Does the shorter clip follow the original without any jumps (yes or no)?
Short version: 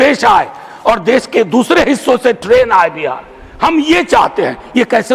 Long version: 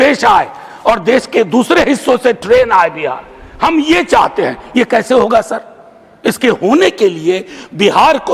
yes